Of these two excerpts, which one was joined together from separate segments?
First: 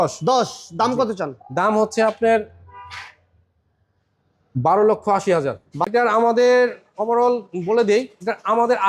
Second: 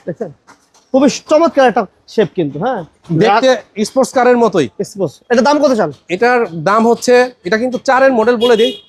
first; 1 cut; at 5.7 s

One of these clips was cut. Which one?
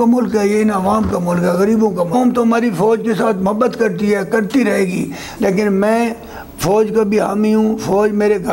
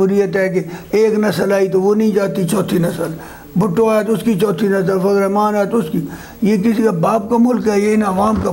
first; 2 cuts; at 2.1 s, 5.2 s

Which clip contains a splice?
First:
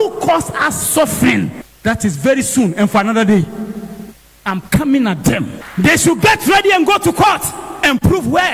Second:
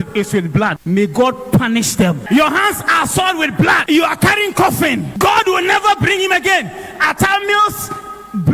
second; 4 cuts; at 0.8 s, 2.2 s, 3.8 s, 5.1 s

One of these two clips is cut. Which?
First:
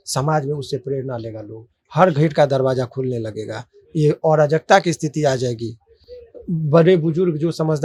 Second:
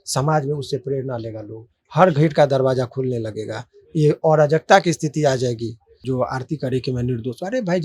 second; 1 cut; at 6.0 s

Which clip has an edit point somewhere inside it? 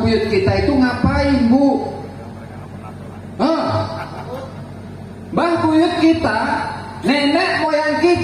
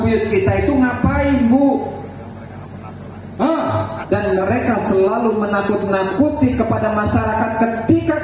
second; 1 cut; at 4.0 s

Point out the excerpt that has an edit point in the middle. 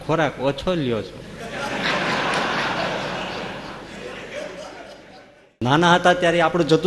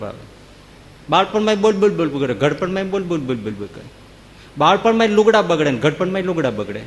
first; 1 cut; at 5.5 s

